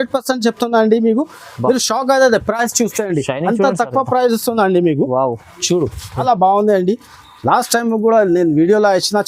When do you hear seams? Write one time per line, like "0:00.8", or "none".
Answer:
0:06.2